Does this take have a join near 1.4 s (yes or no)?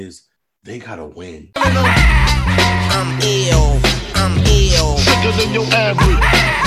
yes